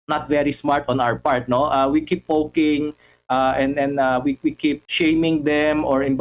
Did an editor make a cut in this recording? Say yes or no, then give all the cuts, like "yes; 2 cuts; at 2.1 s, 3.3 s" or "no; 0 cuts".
yes; 1 cut; at 4.8 s